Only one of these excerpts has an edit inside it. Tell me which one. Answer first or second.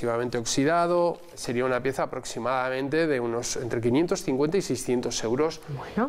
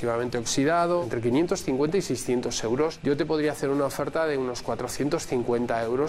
second